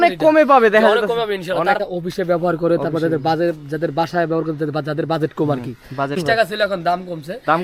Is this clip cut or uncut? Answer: cut